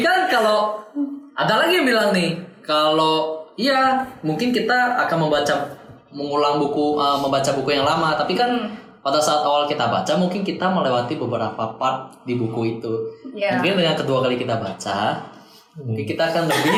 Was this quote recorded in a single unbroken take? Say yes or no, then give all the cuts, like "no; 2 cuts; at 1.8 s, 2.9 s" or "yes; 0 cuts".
yes; 0 cuts